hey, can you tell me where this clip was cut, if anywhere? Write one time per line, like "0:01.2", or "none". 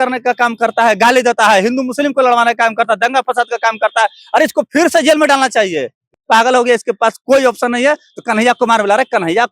0:06.0

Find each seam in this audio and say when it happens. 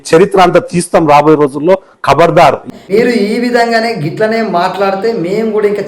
0:02.5

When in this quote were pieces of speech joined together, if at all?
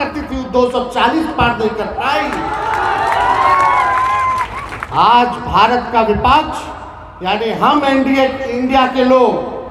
none

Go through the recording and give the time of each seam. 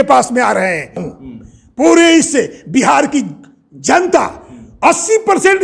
0:01.0

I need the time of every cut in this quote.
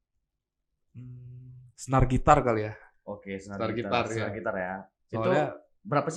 none

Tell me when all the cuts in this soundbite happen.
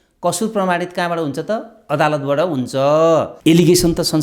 0:03.3

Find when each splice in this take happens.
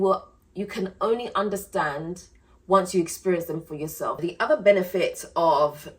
0:04.2

